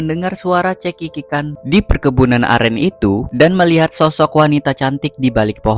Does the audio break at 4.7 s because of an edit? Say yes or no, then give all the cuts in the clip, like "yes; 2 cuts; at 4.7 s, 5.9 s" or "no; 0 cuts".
no; 2 cuts; at 1.6 s, 3.3 s